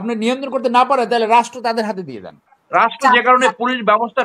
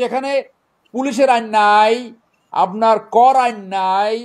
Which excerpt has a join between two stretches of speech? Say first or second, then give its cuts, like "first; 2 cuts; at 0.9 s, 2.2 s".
first; 1 cut; at 2.6 s